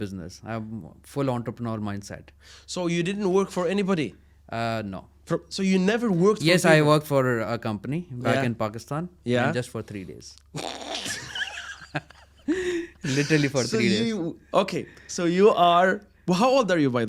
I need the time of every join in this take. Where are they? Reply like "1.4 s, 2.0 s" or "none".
none